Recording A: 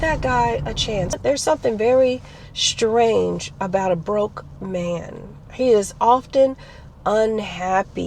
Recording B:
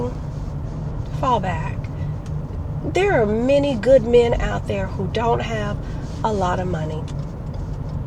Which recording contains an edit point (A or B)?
A